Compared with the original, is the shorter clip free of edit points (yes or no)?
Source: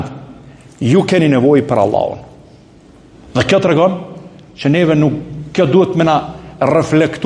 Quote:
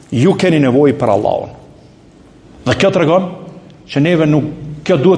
yes